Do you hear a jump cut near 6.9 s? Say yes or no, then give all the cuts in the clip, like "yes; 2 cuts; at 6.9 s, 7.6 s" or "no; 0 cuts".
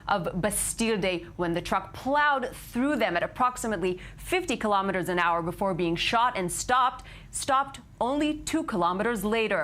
no; 1 cut; at 2.0 s